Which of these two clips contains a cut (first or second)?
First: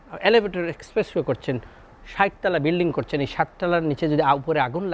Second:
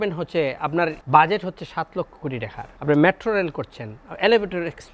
second